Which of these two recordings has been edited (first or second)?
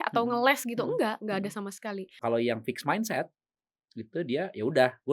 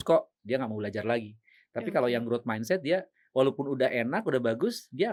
first